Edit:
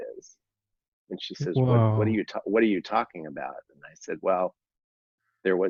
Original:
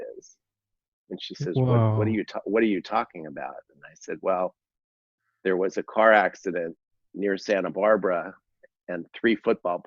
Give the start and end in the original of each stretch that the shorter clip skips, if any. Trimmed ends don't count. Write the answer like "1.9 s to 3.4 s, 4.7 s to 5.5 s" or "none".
none